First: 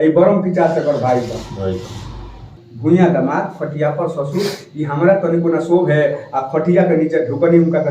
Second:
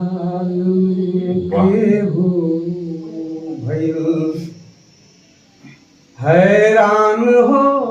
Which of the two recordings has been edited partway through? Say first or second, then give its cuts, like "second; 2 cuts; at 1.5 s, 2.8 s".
first; 1 cut; at 2.6 s